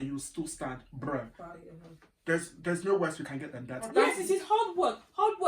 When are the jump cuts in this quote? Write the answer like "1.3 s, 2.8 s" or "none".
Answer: 3.9 s